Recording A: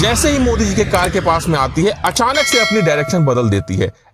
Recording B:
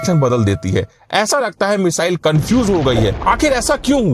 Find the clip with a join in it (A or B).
B